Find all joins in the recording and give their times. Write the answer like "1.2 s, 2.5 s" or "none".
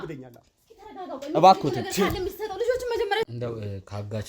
3.3 s